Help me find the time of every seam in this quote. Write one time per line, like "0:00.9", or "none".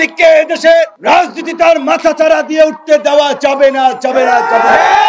0:00.9